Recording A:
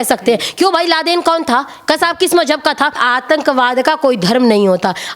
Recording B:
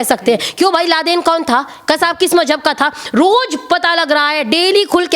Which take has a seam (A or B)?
A